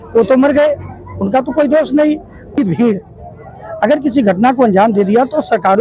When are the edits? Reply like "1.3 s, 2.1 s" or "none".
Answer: 2.5 s